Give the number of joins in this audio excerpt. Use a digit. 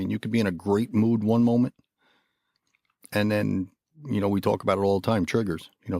0